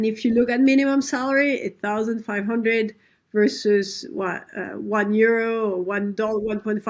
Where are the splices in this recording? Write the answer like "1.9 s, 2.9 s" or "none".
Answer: none